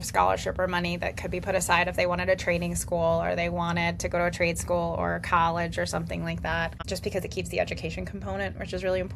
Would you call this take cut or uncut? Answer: cut